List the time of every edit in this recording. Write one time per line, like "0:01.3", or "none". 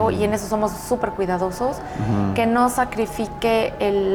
none